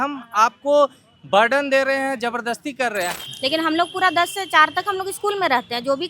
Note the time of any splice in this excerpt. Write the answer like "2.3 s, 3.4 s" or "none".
3.2 s